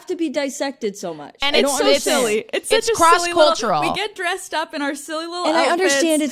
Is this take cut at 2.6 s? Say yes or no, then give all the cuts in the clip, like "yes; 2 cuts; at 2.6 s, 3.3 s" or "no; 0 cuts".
no; 0 cuts